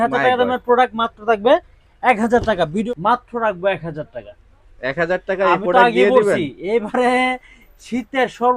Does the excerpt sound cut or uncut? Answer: cut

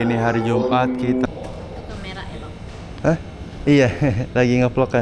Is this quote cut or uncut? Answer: cut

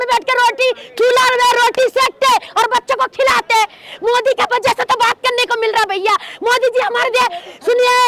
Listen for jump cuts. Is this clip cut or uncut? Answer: uncut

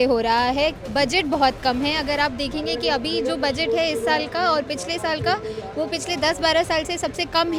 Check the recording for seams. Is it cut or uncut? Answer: uncut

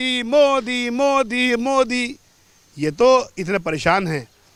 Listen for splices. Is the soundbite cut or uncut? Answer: uncut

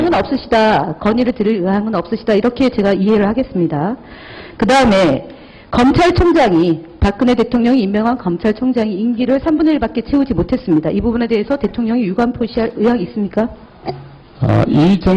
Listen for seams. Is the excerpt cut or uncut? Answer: uncut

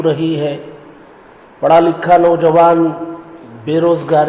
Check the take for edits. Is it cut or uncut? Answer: uncut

